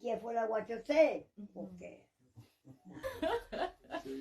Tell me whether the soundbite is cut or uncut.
cut